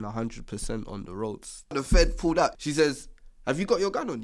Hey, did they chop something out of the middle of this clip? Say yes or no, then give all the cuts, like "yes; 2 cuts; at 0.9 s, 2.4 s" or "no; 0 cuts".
yes; 2 cuts; at 1.7 s, 2.5 s